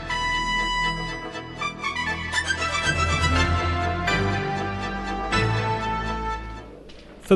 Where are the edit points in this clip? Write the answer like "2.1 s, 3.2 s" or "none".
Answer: 5.3 s